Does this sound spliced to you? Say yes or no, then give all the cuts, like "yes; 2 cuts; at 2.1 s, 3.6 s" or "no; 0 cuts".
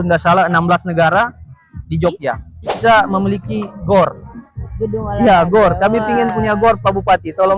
yes; 1 cut; at 2.7 s